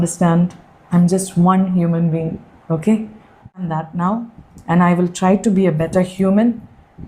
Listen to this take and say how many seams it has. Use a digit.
1